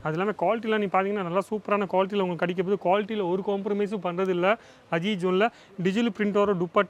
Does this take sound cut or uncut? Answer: uncut